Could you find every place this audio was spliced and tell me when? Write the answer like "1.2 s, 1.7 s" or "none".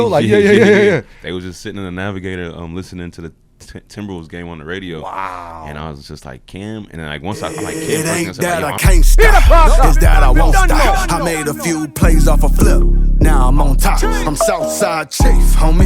7.6 s